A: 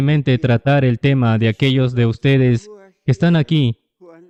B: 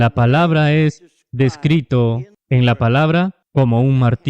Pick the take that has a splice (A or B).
B